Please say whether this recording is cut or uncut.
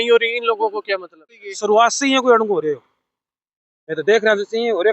cut